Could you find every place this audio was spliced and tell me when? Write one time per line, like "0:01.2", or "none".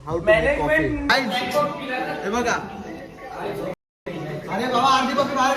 0:01.0